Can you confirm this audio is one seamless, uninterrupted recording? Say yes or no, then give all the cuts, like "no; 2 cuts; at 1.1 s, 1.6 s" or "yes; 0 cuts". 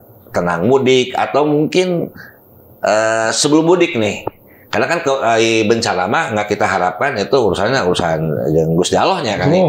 yes; 0 cuts